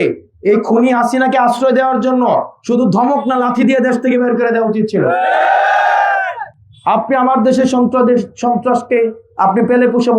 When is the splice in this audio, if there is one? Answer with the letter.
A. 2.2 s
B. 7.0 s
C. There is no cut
C